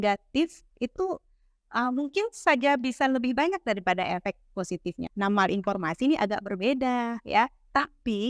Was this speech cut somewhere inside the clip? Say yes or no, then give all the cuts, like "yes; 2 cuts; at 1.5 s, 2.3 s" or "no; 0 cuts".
yes; 1 cut; at 5.0 s